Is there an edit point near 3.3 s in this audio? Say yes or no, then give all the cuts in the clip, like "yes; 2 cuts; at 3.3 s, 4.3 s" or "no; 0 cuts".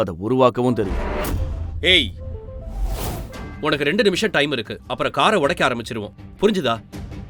yes; 1 cut; at 3.3 s